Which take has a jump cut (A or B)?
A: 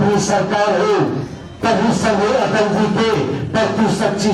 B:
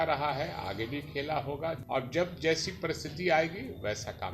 B